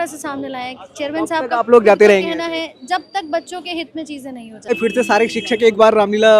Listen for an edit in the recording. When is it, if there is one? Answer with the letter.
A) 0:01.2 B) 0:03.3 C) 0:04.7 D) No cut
C